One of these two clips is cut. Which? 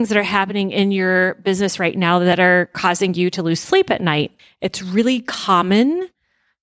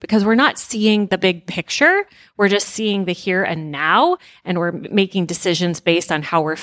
first; 1 cut; at 2.4 s

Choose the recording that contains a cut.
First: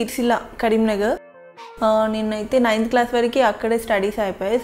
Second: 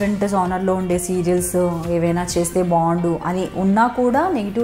first; 1 cut; at 1.3 s

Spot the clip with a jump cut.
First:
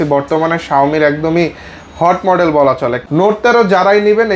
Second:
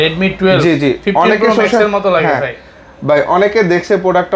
first; 1 cut; at 3.0 s

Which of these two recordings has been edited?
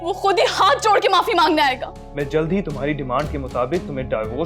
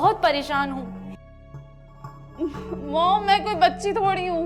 first; 1 cut; at 2.0 s

